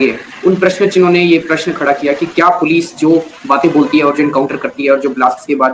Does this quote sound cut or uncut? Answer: uncut